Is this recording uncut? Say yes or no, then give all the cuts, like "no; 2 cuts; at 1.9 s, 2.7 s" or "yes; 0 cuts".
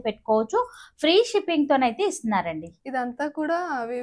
yes; 0 cuts